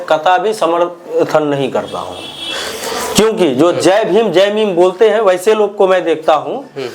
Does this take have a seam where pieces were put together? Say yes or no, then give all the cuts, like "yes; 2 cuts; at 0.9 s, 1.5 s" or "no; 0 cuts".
no; 0 cuts